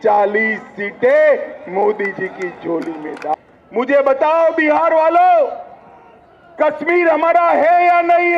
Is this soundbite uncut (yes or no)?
no